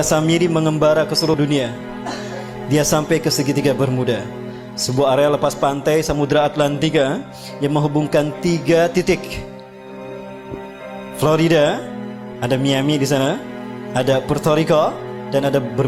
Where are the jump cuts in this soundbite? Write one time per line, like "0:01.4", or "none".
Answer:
0:01.3